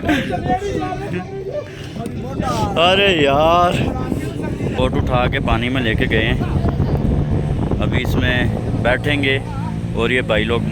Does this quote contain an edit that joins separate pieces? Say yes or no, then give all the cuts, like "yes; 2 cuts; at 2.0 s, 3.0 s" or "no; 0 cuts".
yes; 1 cut; at 4.7 s